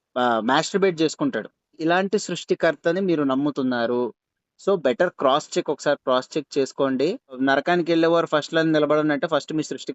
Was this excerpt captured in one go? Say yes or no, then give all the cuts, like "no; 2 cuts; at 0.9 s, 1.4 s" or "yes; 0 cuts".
no; 2 cuts; at 1.8 s, 7.4 s